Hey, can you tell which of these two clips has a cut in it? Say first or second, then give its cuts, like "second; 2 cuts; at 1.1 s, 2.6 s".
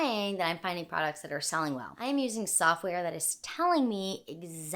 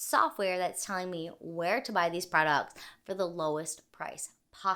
first; 1 cut; at 1.9 s